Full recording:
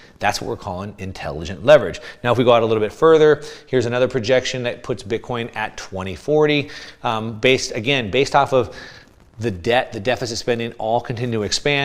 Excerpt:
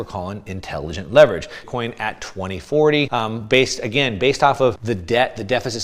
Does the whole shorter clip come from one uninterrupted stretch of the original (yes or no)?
no